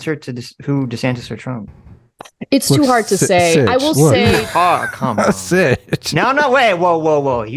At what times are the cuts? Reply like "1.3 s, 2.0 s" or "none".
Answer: none